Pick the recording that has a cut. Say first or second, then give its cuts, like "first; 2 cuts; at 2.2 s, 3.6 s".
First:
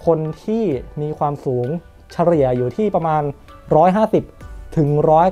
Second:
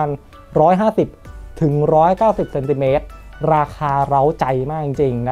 second; 1 cut; at 3.2 s